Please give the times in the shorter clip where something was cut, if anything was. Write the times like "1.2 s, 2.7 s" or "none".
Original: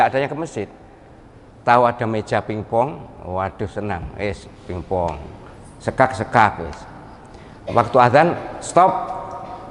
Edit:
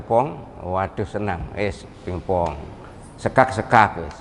none